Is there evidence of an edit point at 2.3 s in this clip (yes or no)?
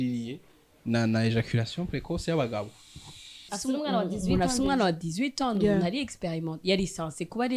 no